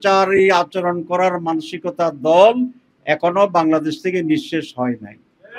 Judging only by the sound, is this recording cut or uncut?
uncut